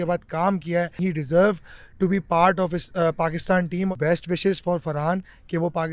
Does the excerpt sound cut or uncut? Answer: cut